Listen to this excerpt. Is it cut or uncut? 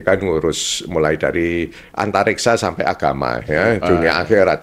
uncut